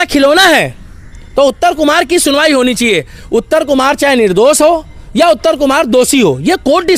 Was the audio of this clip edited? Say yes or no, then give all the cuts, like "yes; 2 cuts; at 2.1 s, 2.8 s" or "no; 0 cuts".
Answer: no; 0 cuts